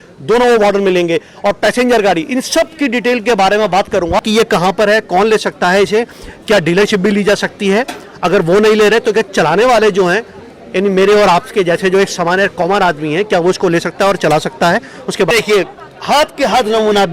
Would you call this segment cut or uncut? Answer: cut